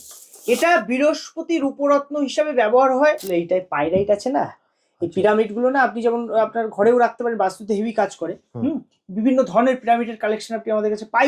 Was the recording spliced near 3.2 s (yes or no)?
yes